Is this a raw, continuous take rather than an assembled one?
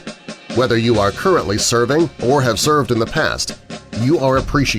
yes; 0 cuts

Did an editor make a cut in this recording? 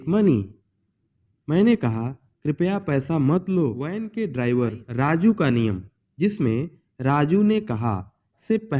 yes; 1 cut; at 4.0 s

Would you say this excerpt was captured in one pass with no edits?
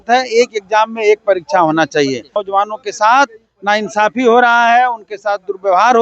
no; 1 cut; at 2.3 s

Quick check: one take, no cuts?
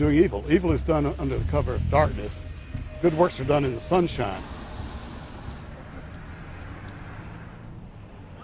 no; 1 cut; at 2.2 s

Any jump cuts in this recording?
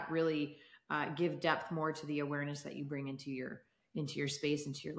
no; 0 cuts

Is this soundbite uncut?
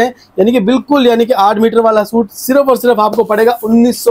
yes; 0 cuts

